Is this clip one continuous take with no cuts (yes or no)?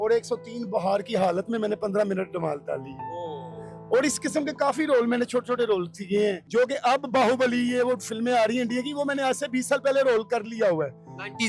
no